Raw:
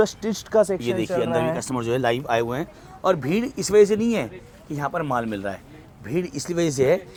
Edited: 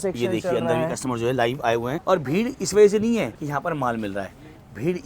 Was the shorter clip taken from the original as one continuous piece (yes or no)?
no